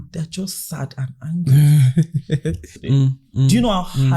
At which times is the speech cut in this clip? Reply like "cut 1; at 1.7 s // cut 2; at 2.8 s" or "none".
cut 1; at 2.7 s